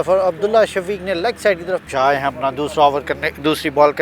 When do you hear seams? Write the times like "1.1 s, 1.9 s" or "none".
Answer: 1.9 s